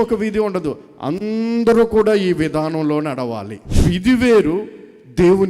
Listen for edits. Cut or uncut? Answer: cut